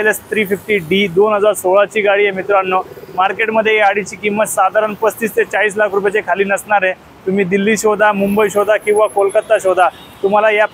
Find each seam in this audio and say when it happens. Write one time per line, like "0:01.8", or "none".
none